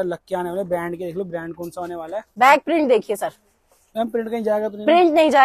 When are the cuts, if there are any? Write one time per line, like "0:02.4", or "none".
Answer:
0:02.3